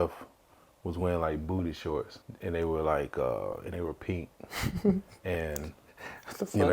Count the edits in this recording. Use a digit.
1